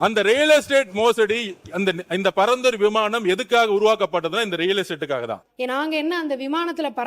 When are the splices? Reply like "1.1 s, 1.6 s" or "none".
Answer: 5.4 s